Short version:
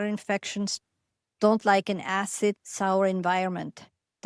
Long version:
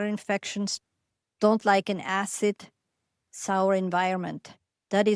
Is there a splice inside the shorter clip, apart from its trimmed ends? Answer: yes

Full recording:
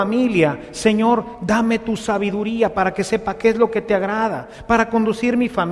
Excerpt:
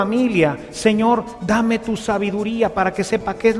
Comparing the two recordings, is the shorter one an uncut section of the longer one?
yes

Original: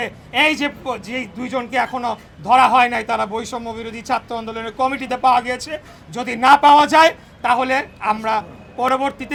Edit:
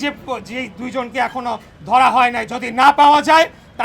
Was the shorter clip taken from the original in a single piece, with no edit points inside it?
no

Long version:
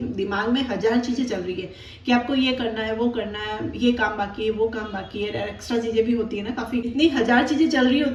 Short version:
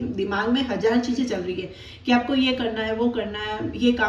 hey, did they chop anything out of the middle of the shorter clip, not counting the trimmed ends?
no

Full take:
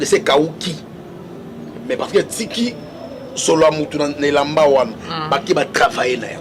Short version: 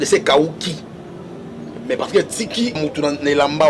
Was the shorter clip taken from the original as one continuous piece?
no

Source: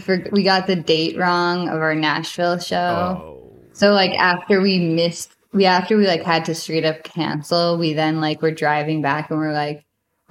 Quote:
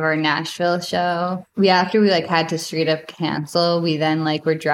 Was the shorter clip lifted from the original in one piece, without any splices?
no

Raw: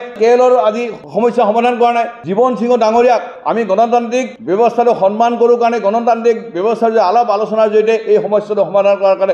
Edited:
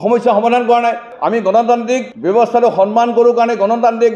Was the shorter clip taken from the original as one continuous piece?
no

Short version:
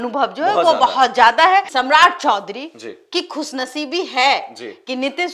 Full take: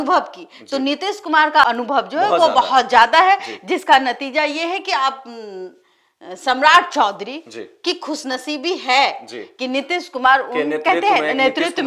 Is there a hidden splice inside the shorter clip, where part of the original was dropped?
yes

